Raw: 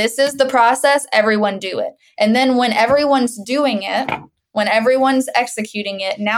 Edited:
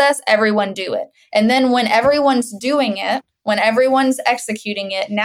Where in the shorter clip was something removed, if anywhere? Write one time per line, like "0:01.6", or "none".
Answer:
0:03.3